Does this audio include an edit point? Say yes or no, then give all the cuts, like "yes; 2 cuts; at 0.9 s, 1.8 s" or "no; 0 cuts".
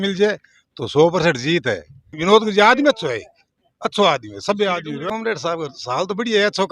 yes; 2 cuts; at 2.2 s, 5.0 s